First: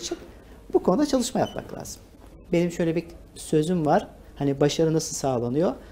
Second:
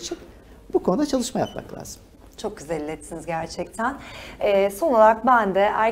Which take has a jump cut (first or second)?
first